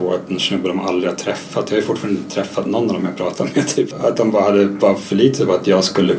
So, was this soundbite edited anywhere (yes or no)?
yes